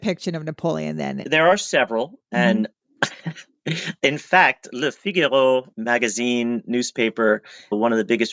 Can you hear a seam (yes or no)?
yes